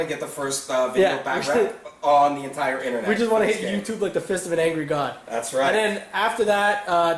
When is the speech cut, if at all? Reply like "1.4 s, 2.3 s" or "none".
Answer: 6.1 s